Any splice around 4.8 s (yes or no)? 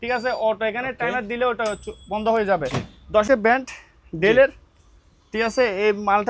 no